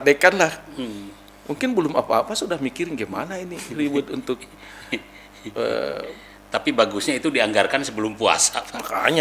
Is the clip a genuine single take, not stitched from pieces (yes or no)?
yes